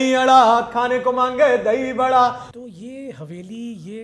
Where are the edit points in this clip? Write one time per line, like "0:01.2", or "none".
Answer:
0:02.4

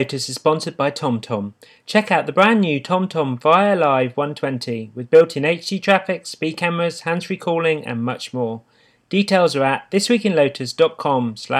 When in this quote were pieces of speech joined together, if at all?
none

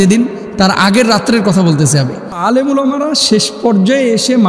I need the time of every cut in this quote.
0:02.4

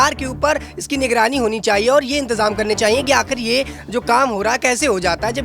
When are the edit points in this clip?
none

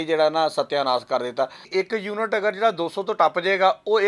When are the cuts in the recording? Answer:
0:01.6

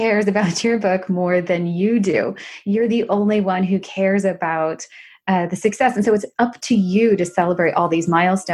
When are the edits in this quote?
none

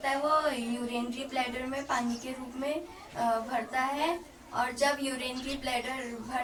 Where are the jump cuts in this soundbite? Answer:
none

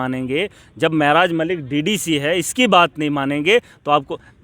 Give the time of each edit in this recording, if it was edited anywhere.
none

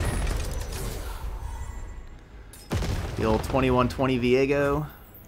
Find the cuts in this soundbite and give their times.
none

